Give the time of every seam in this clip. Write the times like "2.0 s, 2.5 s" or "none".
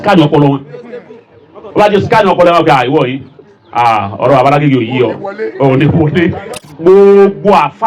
6.8 s